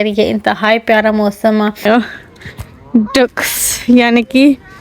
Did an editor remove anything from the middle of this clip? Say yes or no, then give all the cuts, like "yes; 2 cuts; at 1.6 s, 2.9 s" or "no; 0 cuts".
yes; 1 cut; at 1.9 s